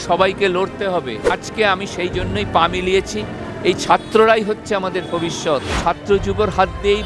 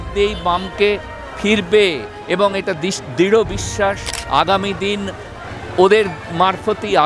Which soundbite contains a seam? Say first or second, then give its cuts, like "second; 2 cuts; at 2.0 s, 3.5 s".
first; 2 cuts; at 1.4 s, 5.8 s